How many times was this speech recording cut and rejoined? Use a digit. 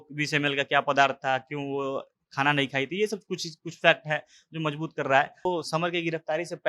1